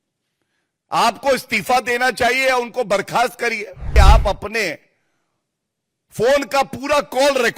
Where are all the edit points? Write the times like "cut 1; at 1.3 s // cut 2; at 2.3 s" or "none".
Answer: cut 1; at 3.9 s